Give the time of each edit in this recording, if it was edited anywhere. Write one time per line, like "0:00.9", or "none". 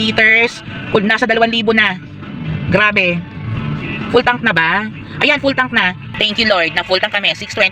0:06.1